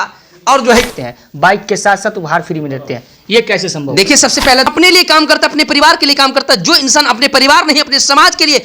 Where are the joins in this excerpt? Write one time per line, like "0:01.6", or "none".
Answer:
0:00.9
0:04.7